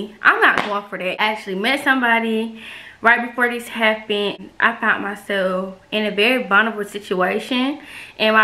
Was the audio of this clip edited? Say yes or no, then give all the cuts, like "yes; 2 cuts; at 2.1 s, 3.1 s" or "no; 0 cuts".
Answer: yes; 2 cuts; at 1.2 s, 4.4 s